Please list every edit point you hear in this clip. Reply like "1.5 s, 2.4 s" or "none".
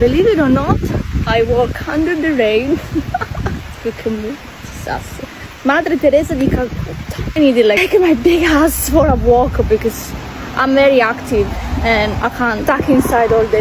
none